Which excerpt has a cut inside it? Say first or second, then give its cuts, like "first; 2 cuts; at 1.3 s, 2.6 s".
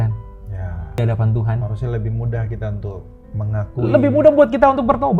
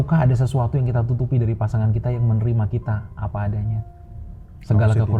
first; 1 cut; at 1.0 s